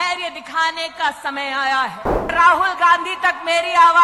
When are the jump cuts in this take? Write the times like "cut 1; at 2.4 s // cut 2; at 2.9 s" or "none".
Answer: cut 1; at 2.3 s